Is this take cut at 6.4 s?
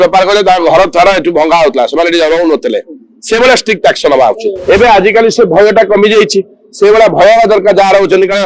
no; 1 cut; at 4.5 s

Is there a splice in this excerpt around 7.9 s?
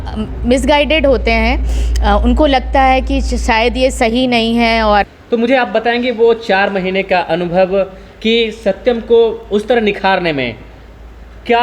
no; 1 cut; at 5.1 s

